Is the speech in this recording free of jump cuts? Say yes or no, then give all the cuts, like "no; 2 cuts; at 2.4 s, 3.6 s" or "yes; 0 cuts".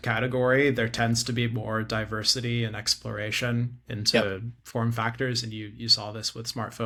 yes; 0 cuts